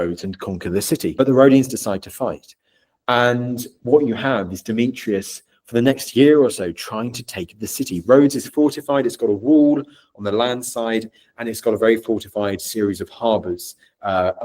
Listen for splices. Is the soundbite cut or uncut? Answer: cut